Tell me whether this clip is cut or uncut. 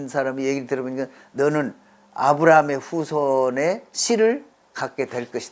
cut